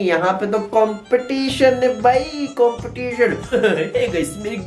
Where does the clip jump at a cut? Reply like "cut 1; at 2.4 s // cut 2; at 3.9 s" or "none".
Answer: cut 1; at 3.5 s